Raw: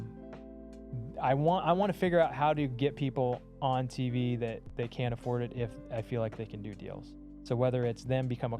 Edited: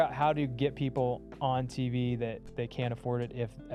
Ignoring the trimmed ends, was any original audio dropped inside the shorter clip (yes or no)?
no